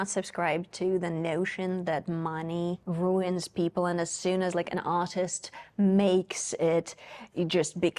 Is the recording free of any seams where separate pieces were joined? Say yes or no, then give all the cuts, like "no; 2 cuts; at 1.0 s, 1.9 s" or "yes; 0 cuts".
yes; 0 cuts